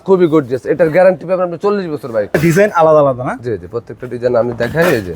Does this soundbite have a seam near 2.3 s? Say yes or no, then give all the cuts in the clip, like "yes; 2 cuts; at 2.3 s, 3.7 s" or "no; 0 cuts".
yes; 1 cut; at 2.3 s